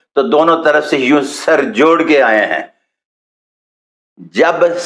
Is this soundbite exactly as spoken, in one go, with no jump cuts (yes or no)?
yes